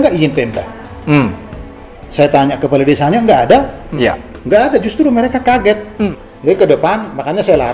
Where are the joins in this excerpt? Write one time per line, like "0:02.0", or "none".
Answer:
0:03.9
0:06.1